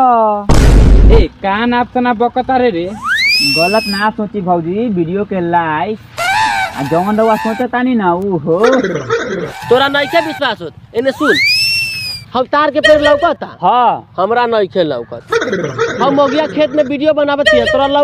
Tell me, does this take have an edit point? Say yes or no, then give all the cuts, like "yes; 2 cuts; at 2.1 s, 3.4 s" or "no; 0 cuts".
yes; 1 cut; at 9.5 s